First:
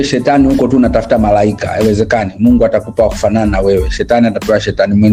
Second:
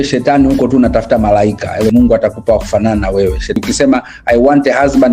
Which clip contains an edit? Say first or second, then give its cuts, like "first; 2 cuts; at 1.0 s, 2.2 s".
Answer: second; 2 cuts; at 1.9 s, 3.6 s